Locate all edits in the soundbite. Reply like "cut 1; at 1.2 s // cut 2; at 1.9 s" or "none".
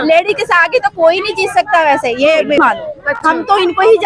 cut 1; at 2.6 s